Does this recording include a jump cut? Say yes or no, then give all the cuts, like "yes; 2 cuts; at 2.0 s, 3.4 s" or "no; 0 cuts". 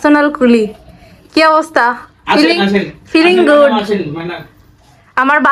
no; 0 cuts